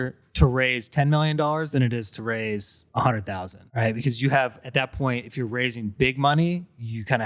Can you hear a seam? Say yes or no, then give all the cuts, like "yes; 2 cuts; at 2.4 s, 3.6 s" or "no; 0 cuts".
yes; 2 cuts; at 2.8 s, 3.6 s